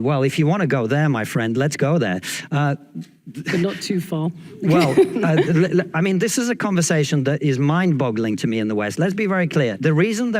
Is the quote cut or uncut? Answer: cut